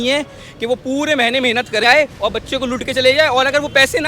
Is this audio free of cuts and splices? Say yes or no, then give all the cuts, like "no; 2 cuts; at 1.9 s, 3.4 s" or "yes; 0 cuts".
no; 1 cut; at 1.8 s